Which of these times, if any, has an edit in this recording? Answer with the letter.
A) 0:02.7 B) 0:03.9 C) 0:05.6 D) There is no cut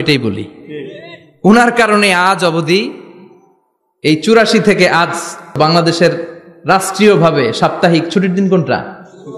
C